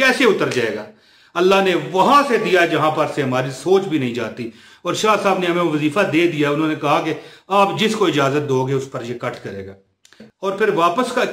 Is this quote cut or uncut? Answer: cut